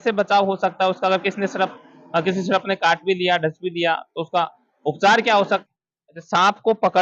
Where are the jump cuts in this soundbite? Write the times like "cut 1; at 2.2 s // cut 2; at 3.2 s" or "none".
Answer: cut 1; at 5.6 s